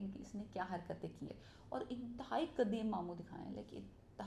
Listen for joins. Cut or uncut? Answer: cut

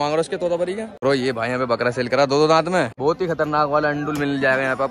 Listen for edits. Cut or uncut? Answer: cut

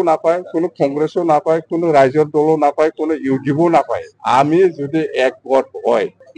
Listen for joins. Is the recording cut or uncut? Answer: uncut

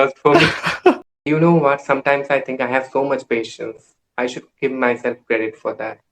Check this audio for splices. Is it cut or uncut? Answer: cut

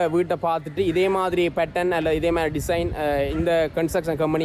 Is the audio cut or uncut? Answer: uncut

